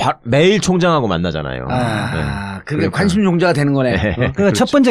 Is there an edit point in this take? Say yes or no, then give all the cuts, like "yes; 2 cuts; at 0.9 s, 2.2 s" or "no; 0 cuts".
yes; 1 cut; at 3.2 s